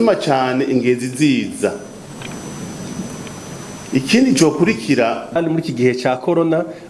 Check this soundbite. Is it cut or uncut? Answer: cut